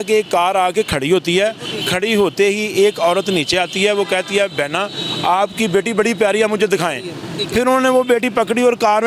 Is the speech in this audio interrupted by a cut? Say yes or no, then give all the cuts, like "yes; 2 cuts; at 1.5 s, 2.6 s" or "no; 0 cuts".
no; 0 cuts